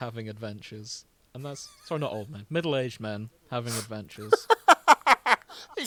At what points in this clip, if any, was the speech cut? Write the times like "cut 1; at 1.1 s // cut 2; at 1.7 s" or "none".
none